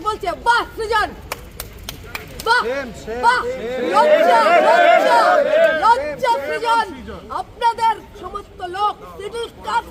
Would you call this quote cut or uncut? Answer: uncut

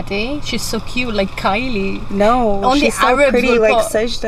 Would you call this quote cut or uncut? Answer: uncut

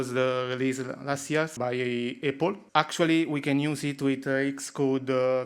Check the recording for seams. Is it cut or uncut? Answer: cut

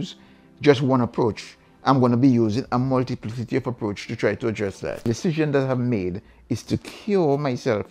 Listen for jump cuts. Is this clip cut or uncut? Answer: cut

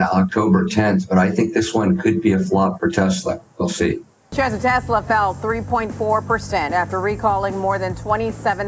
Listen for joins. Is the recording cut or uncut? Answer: cut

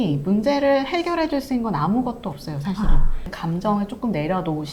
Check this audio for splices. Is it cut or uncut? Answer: uncut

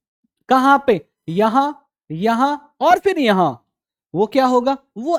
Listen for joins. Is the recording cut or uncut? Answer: uncut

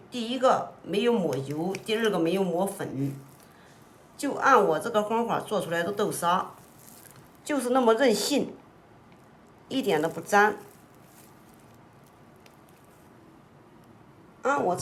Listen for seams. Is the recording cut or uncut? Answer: uncut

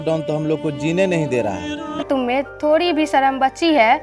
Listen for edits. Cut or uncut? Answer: cut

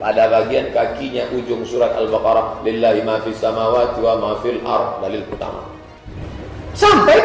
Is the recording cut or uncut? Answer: cut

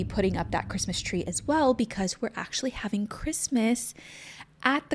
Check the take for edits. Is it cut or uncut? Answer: uncut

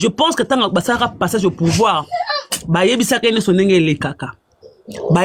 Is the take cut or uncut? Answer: uncut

